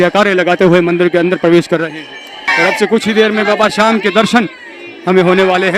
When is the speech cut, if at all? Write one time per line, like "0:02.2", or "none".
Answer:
0:02.5